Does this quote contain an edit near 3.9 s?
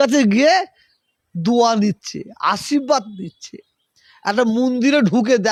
no; 0 cuts

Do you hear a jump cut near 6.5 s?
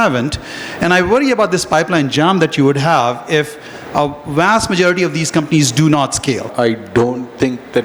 yes; 1 cut; at 6.5 s

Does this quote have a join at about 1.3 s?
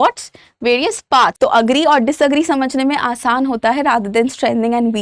yes; 1 cut; at 1.3 s

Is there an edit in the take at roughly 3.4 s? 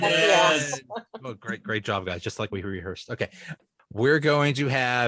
yes; 1 cut; at 3.4 s

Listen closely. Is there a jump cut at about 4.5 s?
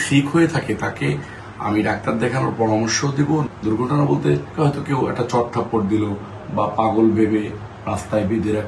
yes; 2 cuts; at 3.5 s, 4.5 s

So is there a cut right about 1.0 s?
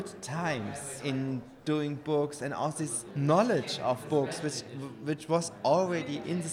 yes; 3 cuts; at 1.0 s, 3.0 s, 4.0 s

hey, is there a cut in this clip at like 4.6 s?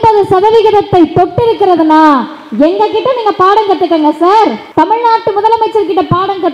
yes; 1 cut; at 4.6 s

